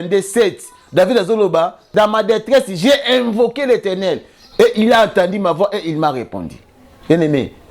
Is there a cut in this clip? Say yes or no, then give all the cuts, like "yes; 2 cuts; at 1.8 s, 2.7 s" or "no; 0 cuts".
yes; 1 cut; at 1.8 s